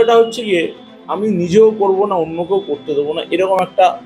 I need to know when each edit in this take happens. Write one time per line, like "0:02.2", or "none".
none

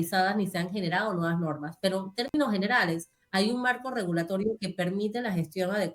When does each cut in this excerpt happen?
0:03.2

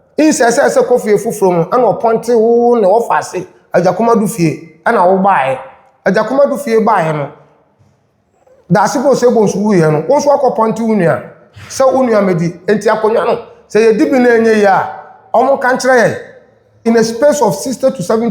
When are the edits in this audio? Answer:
0:16.8

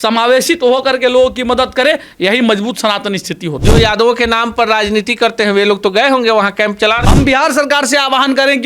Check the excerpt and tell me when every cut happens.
0:03.6
0:07.0

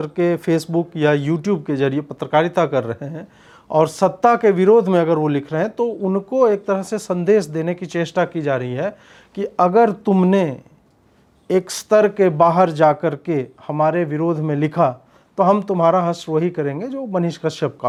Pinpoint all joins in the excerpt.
none

